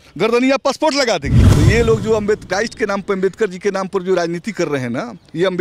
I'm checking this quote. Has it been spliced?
yes; 1 cut; at 1.3 s

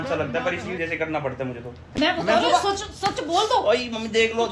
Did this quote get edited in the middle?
yes; 1 cut; at 1.9 s

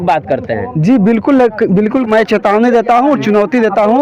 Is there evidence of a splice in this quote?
yes; 1 cut; at 2.1 s

